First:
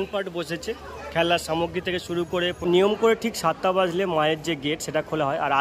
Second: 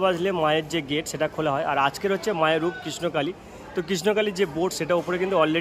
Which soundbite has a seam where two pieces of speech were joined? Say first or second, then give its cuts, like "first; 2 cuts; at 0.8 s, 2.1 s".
first; 1 cut; at 2.6 s